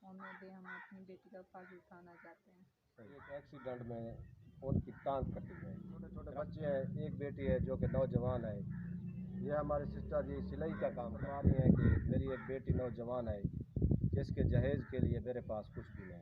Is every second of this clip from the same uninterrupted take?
no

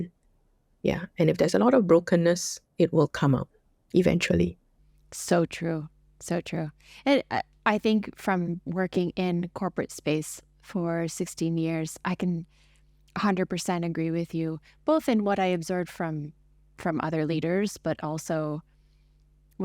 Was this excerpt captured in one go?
yes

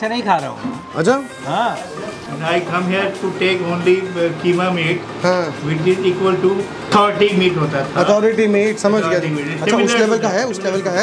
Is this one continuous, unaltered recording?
no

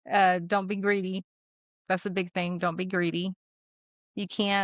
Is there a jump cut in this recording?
no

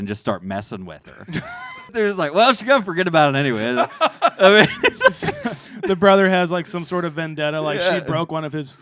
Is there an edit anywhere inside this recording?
yes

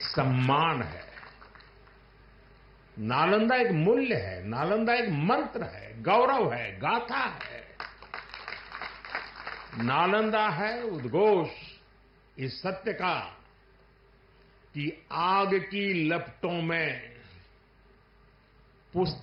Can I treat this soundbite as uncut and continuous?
yes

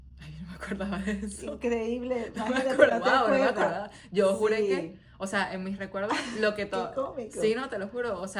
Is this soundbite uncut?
yes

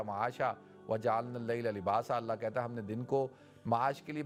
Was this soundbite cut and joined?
no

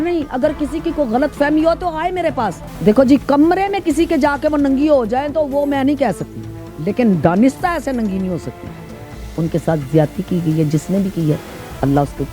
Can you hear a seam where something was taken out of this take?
yes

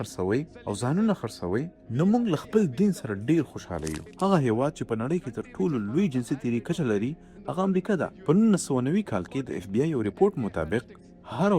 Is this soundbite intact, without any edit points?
no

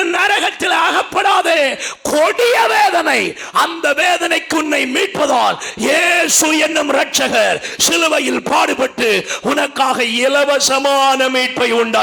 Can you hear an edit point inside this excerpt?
no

